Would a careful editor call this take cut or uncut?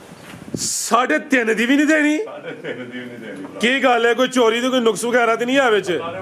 uncut